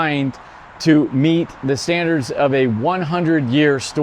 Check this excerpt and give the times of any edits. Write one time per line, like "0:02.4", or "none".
none